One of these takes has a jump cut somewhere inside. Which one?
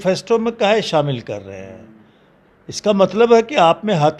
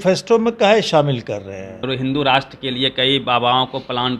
second; 1 cut; at 1.8 s

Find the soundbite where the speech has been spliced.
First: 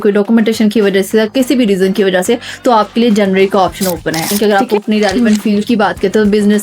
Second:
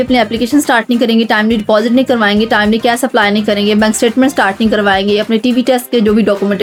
first; 1 cut; at 4.3 s

